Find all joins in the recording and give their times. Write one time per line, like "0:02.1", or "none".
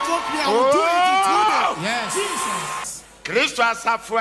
0:02.8

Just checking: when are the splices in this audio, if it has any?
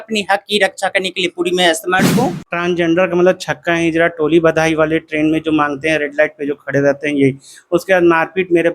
0:02.4

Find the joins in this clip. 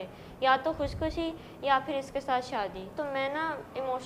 0:02.9

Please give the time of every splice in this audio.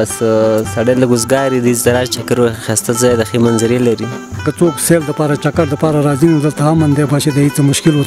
0:04.4

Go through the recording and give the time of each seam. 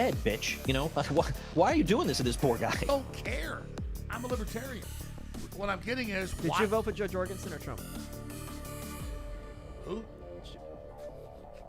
0:02.8

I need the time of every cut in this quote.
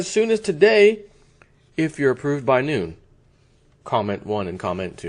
none

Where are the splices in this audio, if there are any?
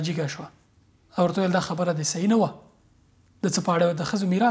none

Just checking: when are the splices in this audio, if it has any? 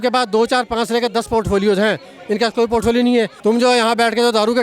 0:03.3

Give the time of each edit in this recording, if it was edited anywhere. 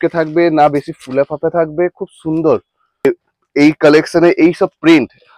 0:03.1

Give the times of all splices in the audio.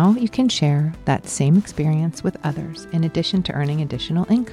none

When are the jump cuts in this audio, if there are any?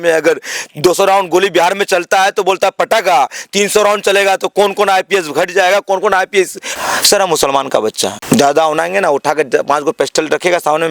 0:06.7
0:08.2

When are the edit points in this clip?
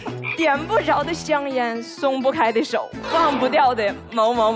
none

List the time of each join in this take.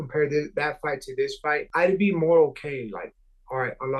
0:01.7

